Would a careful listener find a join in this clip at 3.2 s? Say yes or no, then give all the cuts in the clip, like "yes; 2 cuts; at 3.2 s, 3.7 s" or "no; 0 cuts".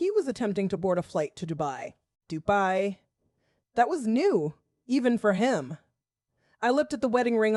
no; 0 cuts